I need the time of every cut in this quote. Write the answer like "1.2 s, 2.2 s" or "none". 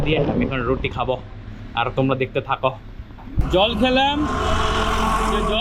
3.2 s